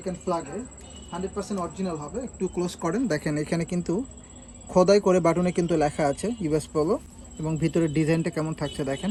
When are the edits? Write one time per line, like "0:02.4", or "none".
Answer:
none